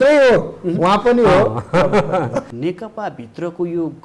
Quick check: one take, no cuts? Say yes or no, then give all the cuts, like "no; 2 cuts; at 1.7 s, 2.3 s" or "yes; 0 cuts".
no; 1 cut; at 2.4 s